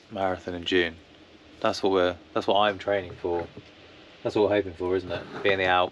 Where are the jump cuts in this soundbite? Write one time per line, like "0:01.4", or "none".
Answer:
none